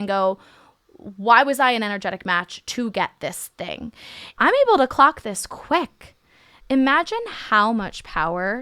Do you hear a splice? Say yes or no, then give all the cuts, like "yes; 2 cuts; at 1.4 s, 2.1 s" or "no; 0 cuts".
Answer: yes; 1 cut; at 4.3 s